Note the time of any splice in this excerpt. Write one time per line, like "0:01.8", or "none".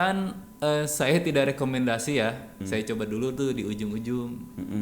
0:02.6